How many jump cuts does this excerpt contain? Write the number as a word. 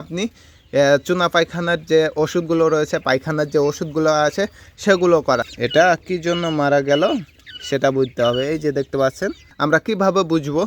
two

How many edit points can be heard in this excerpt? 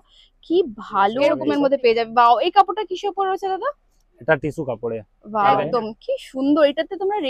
two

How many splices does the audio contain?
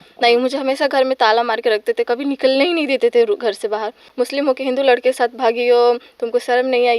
one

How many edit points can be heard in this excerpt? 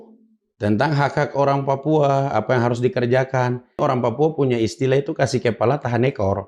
one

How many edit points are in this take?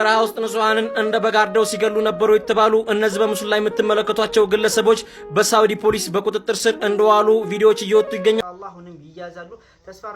one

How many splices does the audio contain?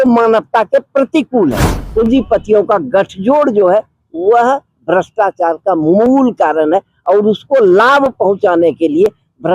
one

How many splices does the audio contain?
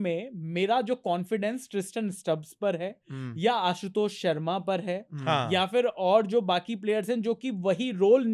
zero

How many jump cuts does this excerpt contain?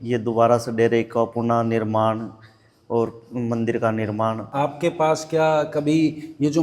one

